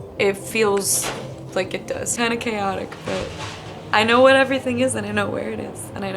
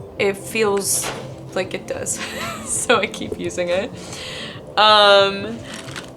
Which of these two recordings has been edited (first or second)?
first